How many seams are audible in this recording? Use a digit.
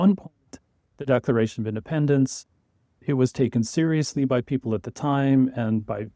0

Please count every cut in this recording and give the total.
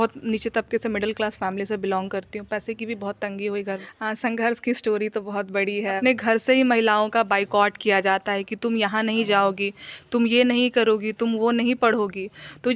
2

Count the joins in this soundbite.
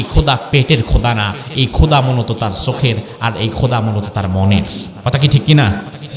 1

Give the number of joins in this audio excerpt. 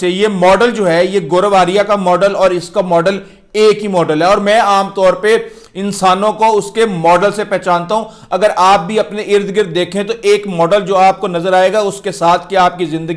0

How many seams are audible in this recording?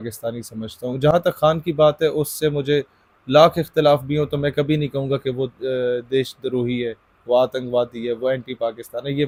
0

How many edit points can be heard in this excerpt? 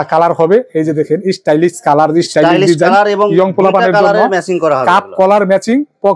0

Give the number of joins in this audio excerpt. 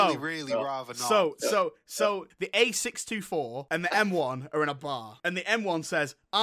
3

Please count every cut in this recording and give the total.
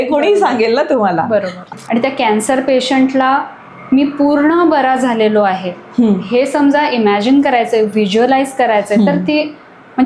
1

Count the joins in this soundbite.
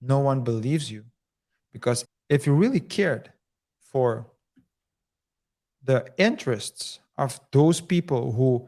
1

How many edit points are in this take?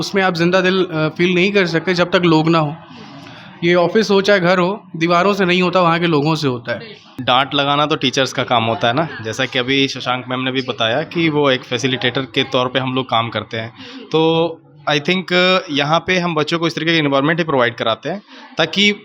1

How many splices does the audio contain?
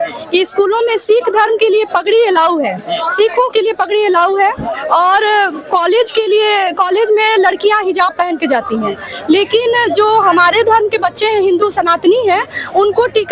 0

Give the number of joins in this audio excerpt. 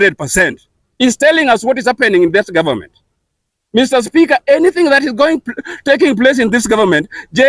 0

